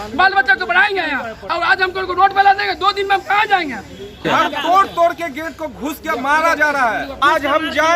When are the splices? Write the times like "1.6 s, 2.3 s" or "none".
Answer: 4.2 s, 7.2 s